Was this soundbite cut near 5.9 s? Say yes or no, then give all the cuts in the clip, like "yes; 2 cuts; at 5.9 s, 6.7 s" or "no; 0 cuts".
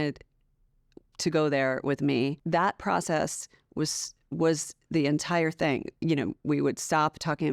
yes; 2 cuts; at 2.4 s, 5.9 s